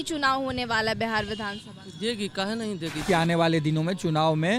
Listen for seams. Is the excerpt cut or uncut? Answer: cut